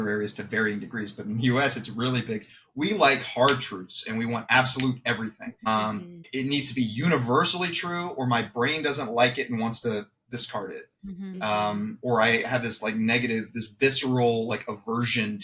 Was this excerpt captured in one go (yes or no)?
yes